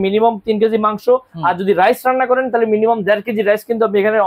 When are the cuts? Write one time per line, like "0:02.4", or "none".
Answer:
none